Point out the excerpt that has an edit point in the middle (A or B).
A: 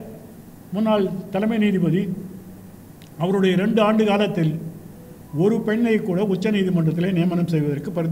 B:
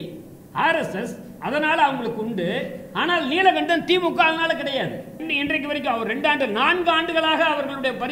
B